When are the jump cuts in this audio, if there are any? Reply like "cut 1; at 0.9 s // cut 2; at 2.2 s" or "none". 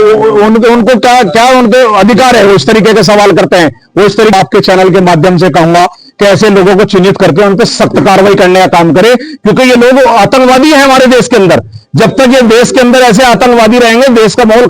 cut 1; at 4.3 s